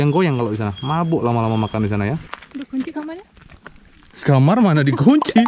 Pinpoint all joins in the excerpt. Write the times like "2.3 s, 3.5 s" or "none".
2.2 s